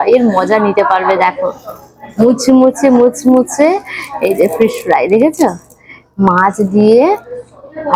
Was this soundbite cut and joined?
no; 0 cuts

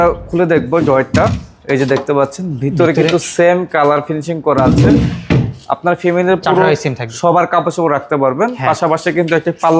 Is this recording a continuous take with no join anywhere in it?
yes; 0 cuts

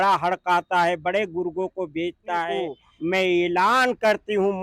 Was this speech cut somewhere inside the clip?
yes; 1 cut; at 2.8 s

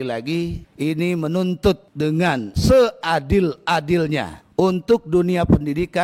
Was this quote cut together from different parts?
no; 0 cuts

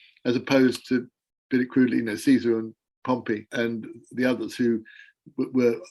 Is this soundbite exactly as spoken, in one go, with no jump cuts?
no; 1 cut; at 3.5 s

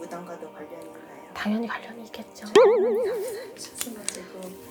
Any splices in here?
no; 0 cuts

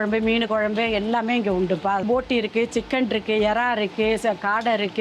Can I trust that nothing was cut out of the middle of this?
no; 1 cut; at 2.0 s

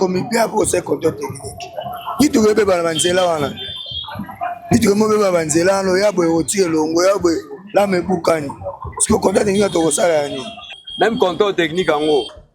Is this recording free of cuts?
no; 1 cut; at 10.8 s

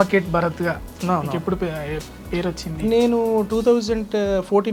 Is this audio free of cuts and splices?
yes; 0 cuts

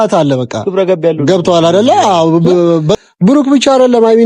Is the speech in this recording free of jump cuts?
no; 1 cut; at 3.0 s

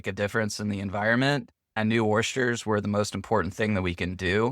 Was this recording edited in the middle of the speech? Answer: yes; 1 cut; at 1.6 s

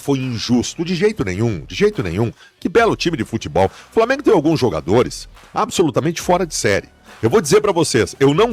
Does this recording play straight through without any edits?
yes; 0 cuts

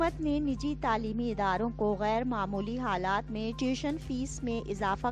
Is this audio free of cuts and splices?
yes; 0 cuts

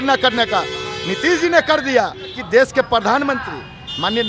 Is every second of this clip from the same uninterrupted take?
no; 1 cut; at 2.3 s

